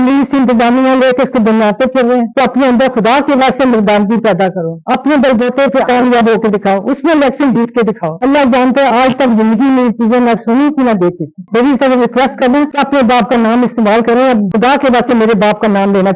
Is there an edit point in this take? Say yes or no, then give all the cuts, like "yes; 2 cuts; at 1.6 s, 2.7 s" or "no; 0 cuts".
yes; 4 cuts; at 2.3 s, 8.2 s, 11.4 s, 14.5 s